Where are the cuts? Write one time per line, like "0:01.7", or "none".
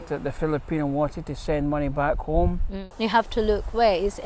0:02.7